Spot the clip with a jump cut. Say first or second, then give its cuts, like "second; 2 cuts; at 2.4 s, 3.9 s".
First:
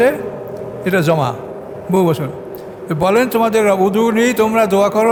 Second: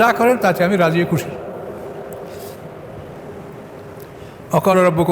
second; 1 cut; at 3.2 s